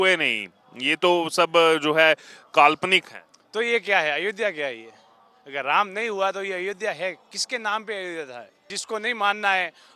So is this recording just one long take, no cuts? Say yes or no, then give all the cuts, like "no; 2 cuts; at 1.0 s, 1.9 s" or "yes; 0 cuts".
no; 1 cut; at 8.7 s